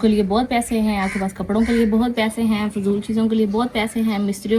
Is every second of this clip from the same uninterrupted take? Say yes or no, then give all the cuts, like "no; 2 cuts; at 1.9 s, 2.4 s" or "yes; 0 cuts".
yes; 0 cuts